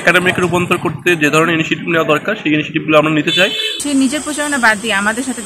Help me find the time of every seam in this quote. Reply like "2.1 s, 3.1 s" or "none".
3.8 s